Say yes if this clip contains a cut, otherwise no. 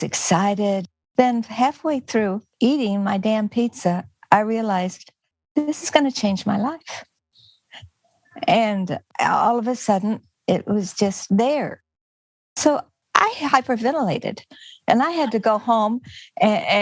no